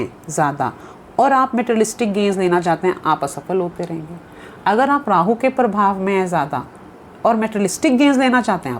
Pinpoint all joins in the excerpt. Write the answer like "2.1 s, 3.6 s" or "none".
none